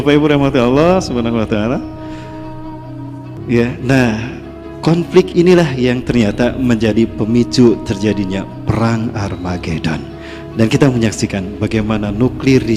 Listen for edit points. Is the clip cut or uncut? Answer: uncut